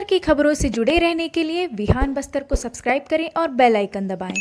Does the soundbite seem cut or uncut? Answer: uncut